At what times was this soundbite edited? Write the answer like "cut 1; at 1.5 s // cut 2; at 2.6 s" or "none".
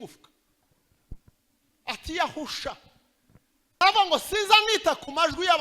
cut 1; at 3.8 s